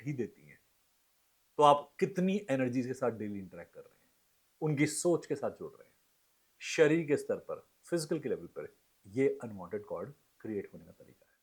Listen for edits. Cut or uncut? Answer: uncut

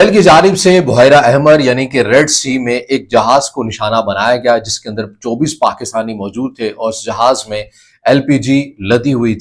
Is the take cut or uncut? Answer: uncut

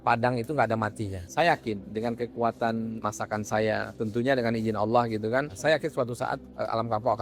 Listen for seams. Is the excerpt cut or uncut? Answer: cut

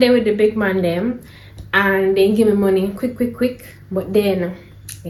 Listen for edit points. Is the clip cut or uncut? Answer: uncut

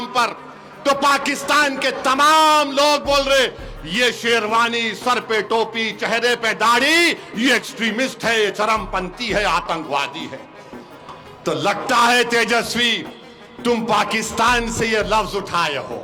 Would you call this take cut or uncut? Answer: uncut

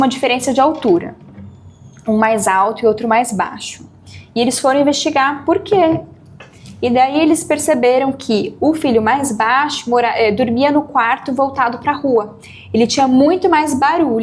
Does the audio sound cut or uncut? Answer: uncut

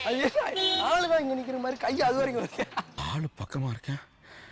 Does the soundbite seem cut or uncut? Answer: uncut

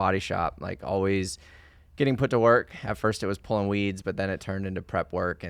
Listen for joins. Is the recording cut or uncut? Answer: uncut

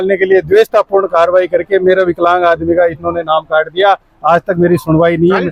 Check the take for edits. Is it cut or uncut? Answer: uncut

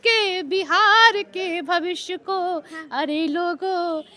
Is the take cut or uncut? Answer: uncut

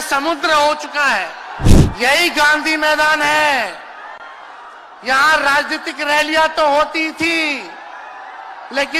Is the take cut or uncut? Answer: cut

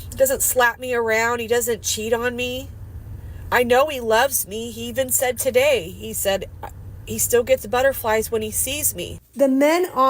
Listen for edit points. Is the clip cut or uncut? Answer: cut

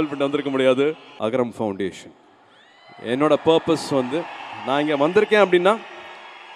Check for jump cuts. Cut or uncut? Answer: cut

